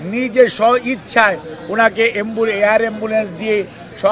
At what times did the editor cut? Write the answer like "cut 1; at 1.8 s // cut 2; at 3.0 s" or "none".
none